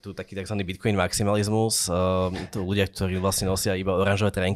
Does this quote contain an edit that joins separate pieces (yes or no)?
no